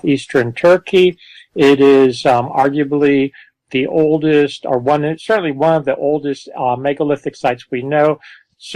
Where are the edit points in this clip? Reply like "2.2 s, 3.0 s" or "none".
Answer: none

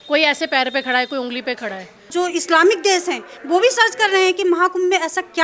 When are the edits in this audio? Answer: 2.1 s

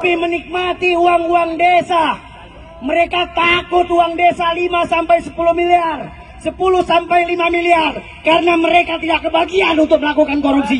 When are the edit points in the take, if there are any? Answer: none

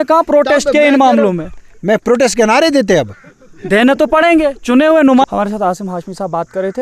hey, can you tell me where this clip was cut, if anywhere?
5.2 s

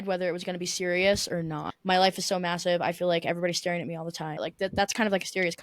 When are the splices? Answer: 1.7 s, 4.4 s

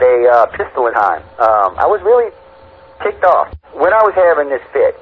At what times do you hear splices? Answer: 0.9 s

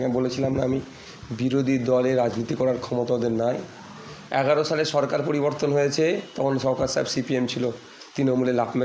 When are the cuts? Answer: none

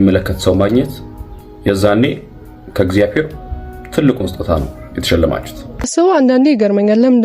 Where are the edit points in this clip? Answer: 5.9 s

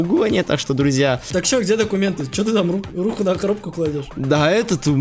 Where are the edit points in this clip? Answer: 1.2 s

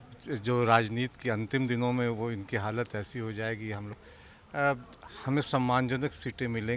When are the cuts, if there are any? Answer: 4.0 s

